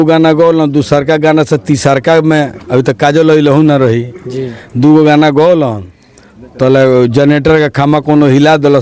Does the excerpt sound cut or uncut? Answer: uncut